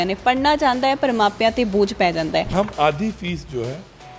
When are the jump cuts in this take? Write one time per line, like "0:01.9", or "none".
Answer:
0:02.5